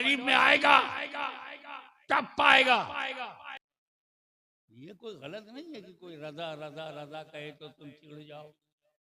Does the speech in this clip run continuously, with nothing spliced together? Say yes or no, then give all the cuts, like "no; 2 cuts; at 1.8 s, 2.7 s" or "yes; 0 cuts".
no; 1 cut; at 3.6 s